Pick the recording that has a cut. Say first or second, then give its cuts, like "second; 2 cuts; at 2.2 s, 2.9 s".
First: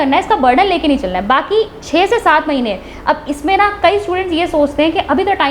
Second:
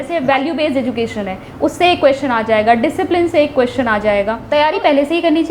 second; 1 cut; at 4.4 s